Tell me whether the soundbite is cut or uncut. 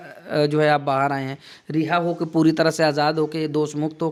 uncut